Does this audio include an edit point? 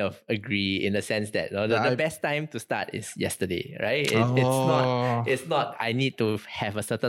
no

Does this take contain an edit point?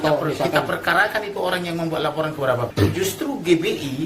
yes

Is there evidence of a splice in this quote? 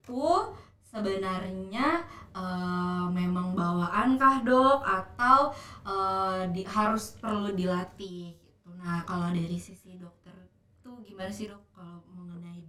no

